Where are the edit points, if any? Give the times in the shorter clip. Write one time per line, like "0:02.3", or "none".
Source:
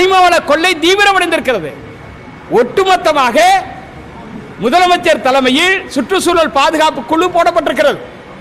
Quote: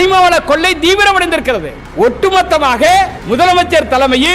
0:01.8
0:03.2